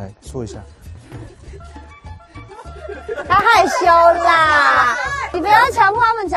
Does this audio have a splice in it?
yes; 1 cut; at 5.3 s

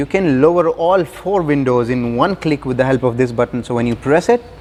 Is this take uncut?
yes; 0 cuts

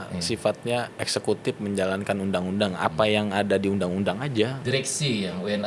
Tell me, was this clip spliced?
yes; 2 cuts; at 1.0 s, 4.6 s

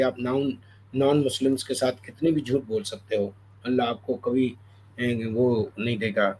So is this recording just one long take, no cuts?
yes; 0 cuts

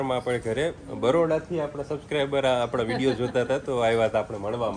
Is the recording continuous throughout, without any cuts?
yes; 0 cuts

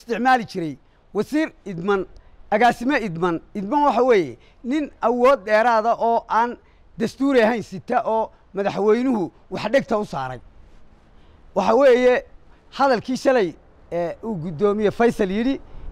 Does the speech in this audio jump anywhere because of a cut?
no; 0 cuts

